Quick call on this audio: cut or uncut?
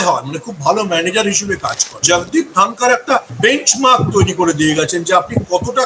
cut